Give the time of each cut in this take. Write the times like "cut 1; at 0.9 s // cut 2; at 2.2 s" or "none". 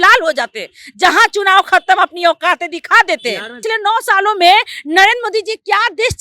cut 1; at 3.6 s